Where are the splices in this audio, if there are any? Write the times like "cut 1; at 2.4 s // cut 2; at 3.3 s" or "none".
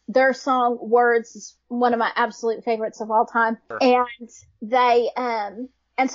cut 1; at 3.7 s